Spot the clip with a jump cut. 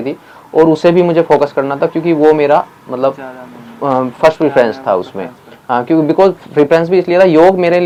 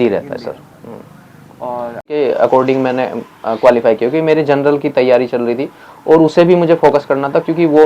second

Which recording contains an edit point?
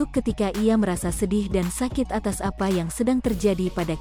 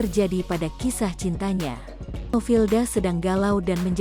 second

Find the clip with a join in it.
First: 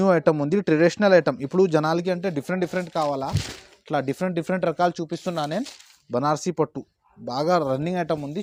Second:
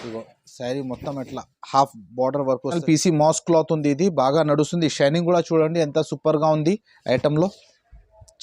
second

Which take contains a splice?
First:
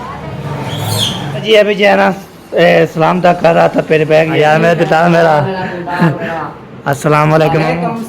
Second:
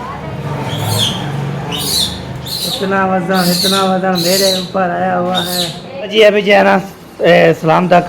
first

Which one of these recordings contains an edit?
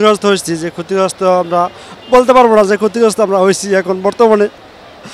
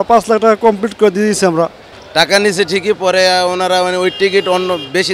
second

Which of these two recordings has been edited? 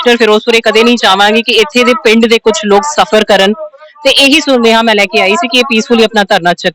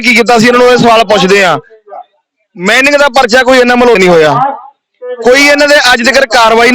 second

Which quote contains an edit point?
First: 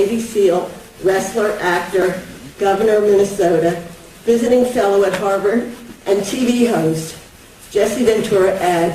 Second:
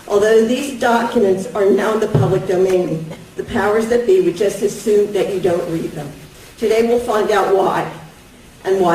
first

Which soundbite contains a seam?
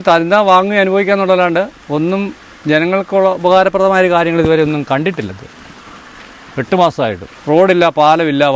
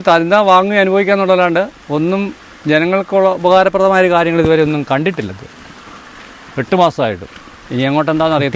first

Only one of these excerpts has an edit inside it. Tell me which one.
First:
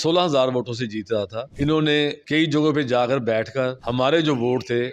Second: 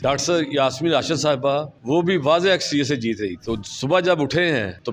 first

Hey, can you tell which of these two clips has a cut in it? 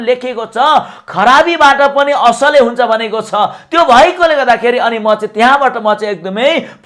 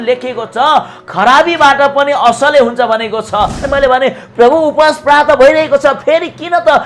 second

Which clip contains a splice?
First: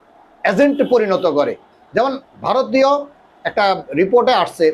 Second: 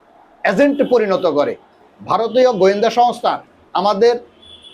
second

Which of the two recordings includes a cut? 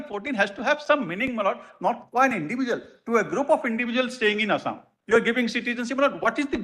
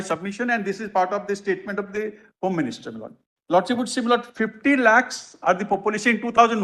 first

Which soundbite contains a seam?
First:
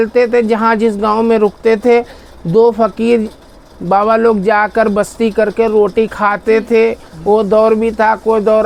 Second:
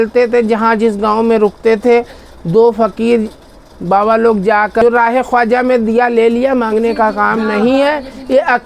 second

